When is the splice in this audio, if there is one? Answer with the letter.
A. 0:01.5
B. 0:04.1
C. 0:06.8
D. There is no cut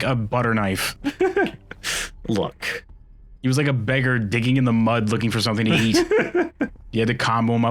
C